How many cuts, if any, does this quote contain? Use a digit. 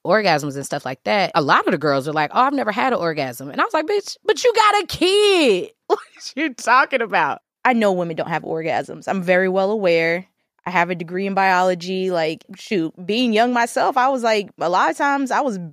3